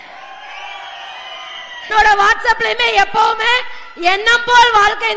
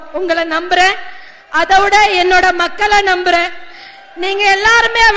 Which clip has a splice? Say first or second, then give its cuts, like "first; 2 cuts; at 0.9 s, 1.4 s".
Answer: first; 1 cut; at 1.9 s